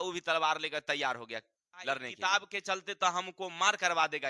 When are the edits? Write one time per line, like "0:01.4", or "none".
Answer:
0:02.1